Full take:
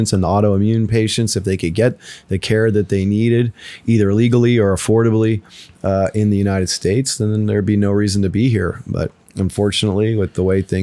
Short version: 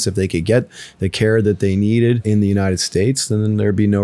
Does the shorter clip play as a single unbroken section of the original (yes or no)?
no